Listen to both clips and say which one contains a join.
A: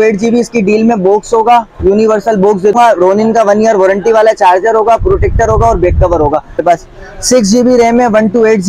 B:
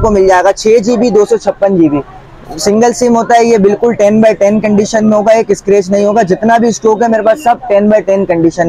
A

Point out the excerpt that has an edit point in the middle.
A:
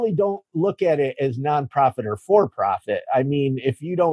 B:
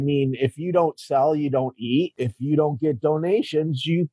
B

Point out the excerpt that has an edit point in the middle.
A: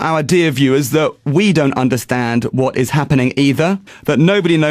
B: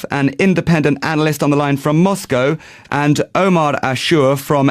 A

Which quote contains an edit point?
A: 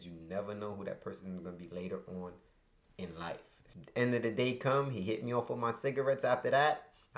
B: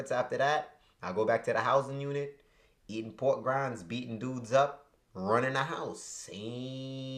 A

